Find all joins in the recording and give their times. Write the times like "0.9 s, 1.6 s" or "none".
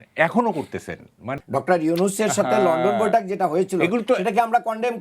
1.3 s